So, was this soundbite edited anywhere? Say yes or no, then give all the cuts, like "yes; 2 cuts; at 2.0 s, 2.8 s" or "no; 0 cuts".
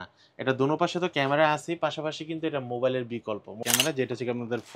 yes; 1 cut; at 3.5 s